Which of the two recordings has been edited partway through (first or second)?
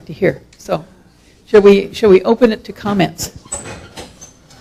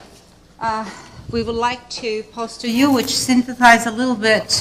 second